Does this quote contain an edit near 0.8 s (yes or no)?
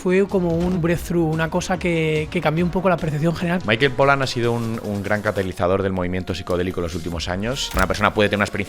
yes